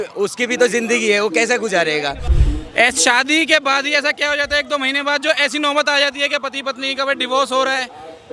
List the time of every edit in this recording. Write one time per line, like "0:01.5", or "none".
0:02.3